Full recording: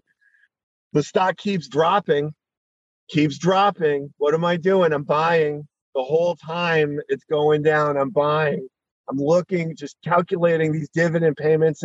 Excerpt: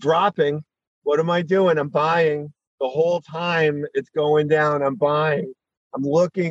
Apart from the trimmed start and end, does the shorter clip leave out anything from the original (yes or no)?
yes